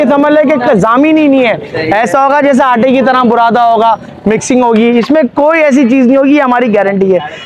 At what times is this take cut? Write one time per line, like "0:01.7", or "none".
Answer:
none